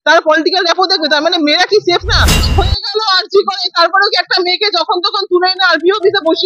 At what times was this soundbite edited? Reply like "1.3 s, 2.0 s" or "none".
2.3 s